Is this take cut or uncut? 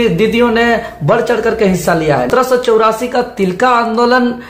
cut